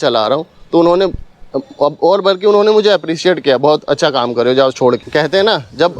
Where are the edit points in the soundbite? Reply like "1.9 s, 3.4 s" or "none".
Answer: 5.0 s